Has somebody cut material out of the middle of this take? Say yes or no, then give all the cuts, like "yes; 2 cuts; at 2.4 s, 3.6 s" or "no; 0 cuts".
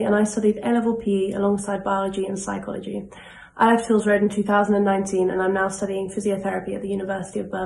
yes; 1 cut; at 5.3 s